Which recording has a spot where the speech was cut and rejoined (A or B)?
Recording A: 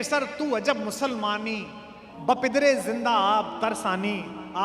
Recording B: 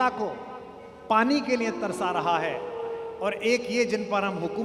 A